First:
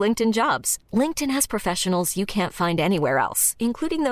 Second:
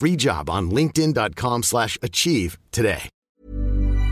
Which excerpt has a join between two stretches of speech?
second; 1 cut; at 3.1 s

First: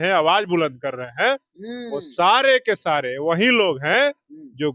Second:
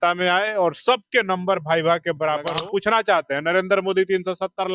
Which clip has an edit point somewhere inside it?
second; 1 cut; at 2.6 s

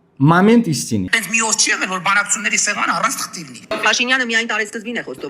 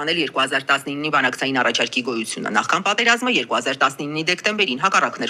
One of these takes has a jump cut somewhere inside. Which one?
first; 2 cuts; at 1.1 s, 3.7 s

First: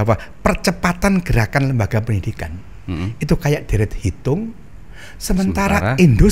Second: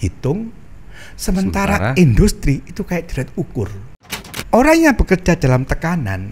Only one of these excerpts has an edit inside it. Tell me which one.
second; 1 cut; at 4.4 s

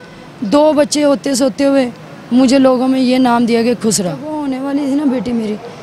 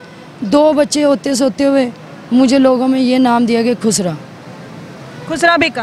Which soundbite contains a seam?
first; 1 cut; at 4.3 s

